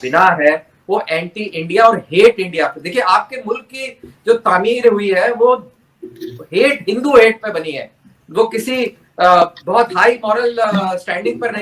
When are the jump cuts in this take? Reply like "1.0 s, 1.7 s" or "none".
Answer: none